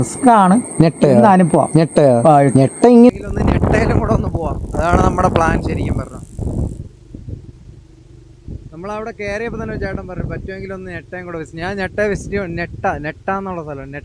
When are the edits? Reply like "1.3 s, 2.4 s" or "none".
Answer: 3.1 s